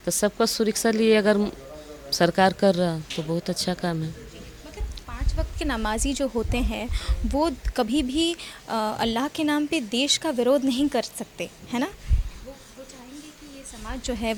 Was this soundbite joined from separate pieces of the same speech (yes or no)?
no